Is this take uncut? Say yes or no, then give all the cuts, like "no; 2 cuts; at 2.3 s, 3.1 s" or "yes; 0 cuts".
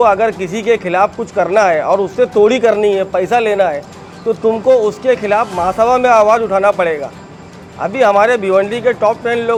yes; 0 cuts